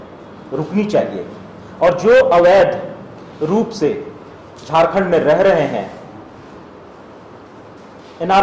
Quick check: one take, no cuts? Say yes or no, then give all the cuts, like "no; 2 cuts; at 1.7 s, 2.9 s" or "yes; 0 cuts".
yes; 0 cuts